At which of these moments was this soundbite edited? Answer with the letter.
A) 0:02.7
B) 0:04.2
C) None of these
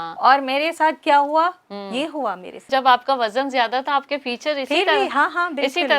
A